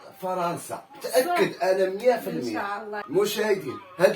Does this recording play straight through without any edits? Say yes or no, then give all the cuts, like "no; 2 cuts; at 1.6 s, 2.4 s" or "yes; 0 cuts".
no; 1 cut; at 3.0 s